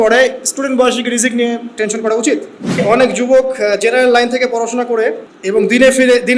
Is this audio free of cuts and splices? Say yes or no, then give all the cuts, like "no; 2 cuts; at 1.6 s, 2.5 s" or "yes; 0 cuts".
no; 2 cuts; at 2.8 s, 5.3 s